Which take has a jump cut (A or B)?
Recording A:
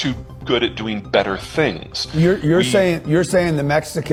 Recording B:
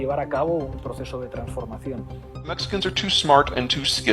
B